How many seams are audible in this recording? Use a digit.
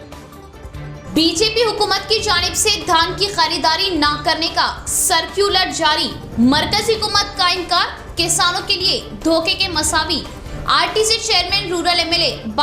1